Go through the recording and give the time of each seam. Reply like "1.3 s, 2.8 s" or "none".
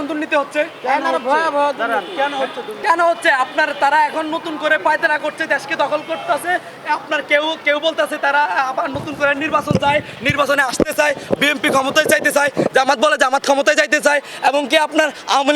2.7 s